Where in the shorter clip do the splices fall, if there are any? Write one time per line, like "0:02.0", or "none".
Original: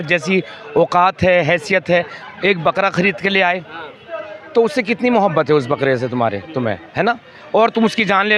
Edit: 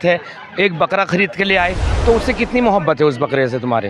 0:01.9